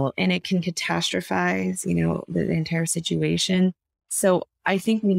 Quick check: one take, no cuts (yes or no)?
yes